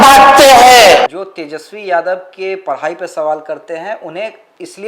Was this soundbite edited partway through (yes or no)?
no